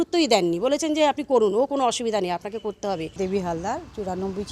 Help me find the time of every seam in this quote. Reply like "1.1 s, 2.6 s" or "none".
3.1 s